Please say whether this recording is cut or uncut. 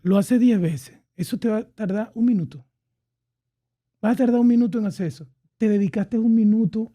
uncut